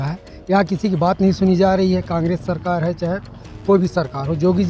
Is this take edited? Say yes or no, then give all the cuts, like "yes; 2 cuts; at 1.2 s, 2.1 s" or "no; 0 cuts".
no; 0 cuts